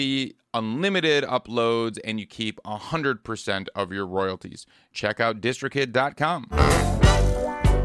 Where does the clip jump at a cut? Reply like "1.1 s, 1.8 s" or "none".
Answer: none